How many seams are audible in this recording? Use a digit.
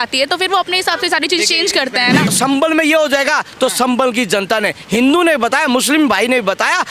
1